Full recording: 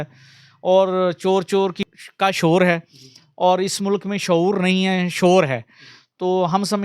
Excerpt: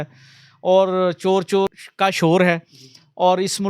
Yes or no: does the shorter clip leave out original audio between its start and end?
yes